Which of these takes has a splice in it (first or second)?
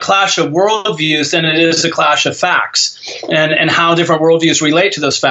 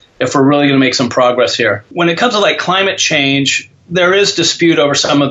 second